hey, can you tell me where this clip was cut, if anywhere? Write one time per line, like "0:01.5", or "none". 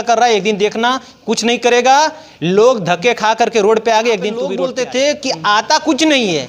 0:04.5

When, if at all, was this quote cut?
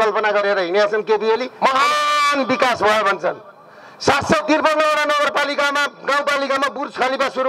0:01.5

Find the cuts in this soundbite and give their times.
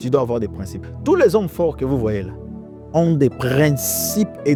none

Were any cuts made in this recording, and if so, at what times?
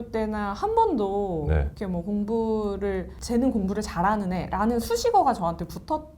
0:03.1

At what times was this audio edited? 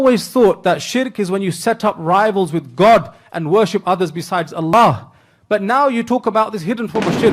none

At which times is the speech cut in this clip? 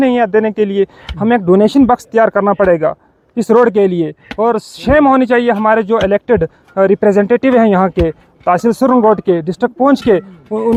none

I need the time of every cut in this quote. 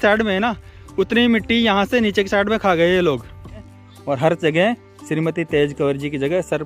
0:03.9

